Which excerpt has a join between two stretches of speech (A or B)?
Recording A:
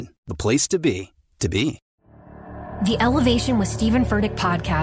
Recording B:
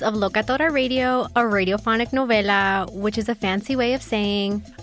A